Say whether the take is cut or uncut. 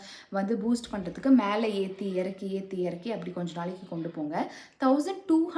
uncut